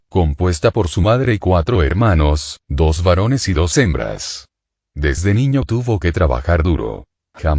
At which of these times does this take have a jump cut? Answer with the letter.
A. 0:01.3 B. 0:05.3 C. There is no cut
B